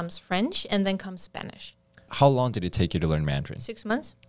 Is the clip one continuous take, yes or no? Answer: no